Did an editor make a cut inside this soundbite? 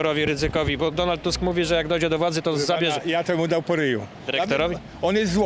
yes; 1 cut; at 4.2 s

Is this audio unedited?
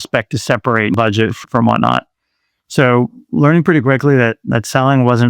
no; 1 cut; at 0.9 s

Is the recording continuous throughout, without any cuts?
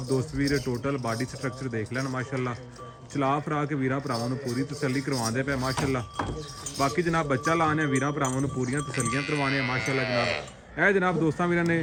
yes; 0 cuts

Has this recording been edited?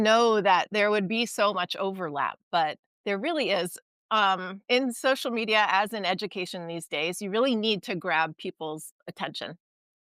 yes; 2 cuts; at 2.9 s, 4.5 s

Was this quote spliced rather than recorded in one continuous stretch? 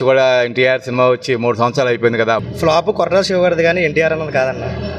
yes; 1 cut; at 2.5 s

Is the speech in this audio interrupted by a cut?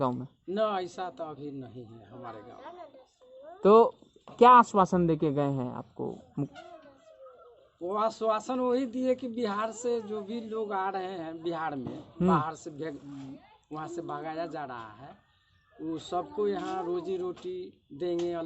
no; 0 cuts

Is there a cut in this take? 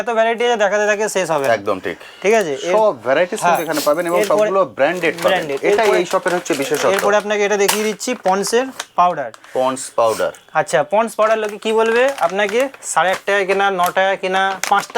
no; 0 cuts

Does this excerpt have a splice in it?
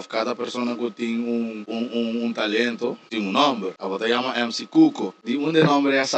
yes; 4 cuts; at 1.6 s, 3.0 s, 3.8 s, 5.1 s

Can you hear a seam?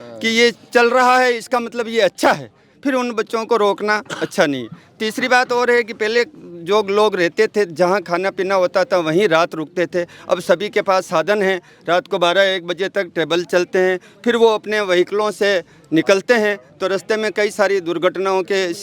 no; 0 cuts

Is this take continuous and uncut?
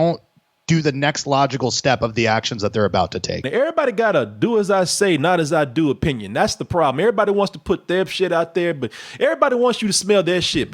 no; 1 cut; at 3.5 s

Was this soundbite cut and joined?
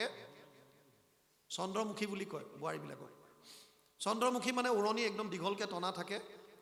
no; 0 cuts

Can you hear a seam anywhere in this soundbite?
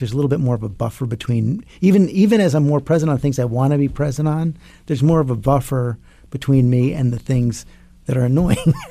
no; 0 cuts

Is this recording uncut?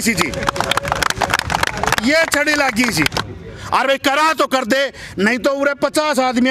no; 1 cut; at 3.3 s

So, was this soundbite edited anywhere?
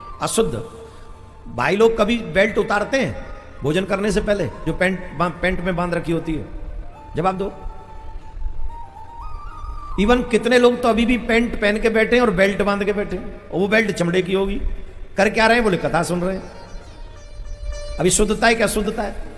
no; 0 cuts

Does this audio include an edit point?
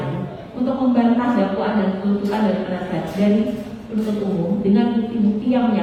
no; 0 cuts

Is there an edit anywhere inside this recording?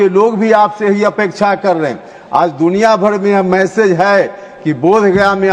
no; 0 cuts

